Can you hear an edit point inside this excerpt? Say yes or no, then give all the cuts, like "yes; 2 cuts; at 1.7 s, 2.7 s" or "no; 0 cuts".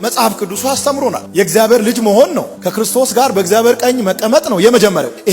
yes; 1 cut; at 1.2 s